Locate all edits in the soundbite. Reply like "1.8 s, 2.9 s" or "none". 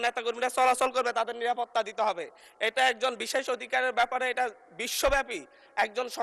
none